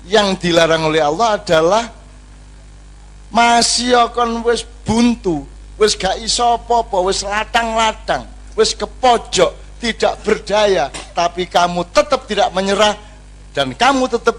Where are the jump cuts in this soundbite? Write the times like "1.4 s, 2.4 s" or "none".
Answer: none